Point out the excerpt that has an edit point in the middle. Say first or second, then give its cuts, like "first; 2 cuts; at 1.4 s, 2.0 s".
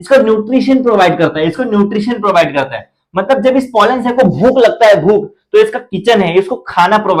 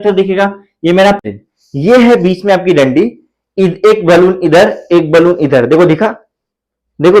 second; 1 cut; at 1.2 s